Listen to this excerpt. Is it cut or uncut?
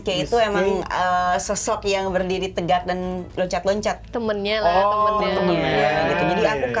uncut